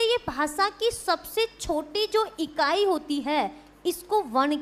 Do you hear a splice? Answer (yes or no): no